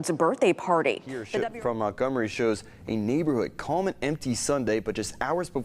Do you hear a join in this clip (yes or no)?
yes